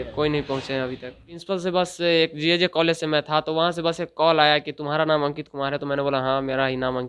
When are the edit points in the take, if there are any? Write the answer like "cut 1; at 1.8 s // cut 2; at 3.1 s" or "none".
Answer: cut 1; at 1.4 s